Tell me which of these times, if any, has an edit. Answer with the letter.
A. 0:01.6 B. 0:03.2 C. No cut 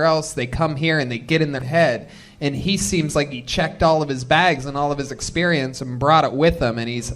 A